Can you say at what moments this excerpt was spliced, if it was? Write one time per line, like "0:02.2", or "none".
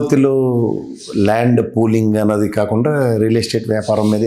none